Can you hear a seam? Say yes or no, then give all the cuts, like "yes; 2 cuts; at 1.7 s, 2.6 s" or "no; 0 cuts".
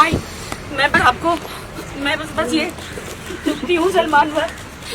yes; 1 cut; at 0.9 s